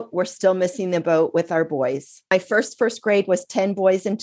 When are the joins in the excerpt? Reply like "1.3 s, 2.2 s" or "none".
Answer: 2.3 s